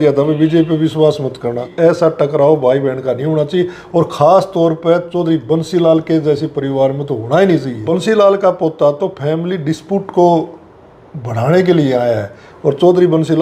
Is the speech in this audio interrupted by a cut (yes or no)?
yes